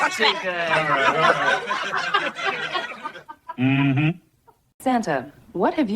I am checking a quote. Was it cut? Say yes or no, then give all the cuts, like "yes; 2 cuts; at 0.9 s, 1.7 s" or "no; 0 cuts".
yes; 1 cut; at 4.8 s